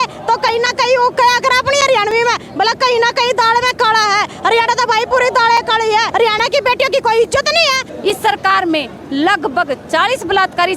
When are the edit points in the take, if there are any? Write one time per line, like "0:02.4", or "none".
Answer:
0:06.1
0:07.9